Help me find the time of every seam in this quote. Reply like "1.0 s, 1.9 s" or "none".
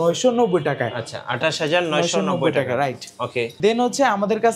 none

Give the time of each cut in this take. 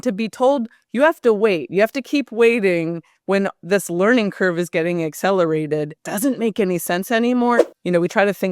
6.0 s, 7.6 s

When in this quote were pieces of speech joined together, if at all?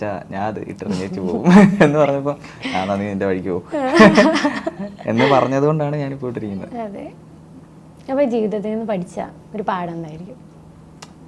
none

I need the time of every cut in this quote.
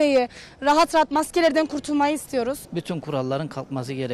2.7 s

